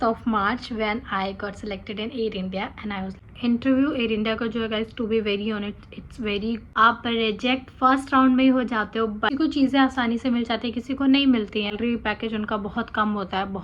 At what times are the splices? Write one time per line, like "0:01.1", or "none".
0:03.2
0:06.7
0:09.3
0:11.7